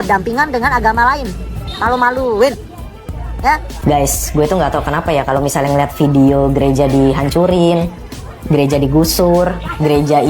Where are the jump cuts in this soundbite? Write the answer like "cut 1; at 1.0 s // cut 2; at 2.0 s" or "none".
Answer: cut 1; at 3.7 s